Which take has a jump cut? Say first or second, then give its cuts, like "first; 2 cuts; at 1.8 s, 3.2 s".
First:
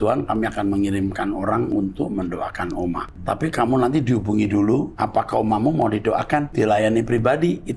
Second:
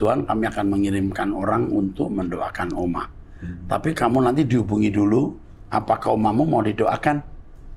first; 3 cuts; at 3.1 s, 5.0 s, 6.5 s